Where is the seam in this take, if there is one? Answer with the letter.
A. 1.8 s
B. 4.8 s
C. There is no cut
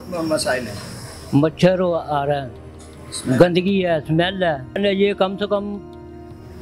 B